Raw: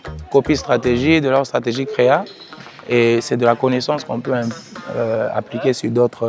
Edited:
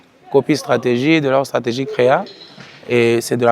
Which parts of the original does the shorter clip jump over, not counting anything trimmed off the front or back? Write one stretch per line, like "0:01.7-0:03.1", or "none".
none